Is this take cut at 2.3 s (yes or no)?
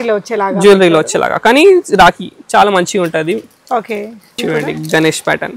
no